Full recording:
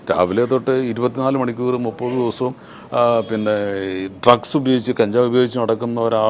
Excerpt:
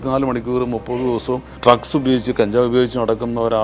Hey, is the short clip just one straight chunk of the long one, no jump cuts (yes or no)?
no